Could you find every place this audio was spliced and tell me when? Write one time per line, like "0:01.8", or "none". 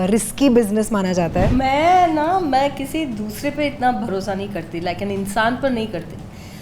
0:01.5